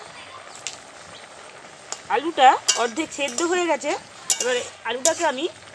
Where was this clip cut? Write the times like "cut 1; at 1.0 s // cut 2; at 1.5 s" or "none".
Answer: none